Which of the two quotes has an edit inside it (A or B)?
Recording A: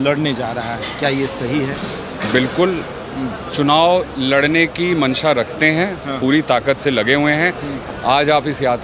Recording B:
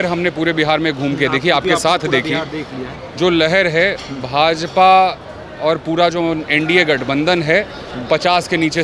A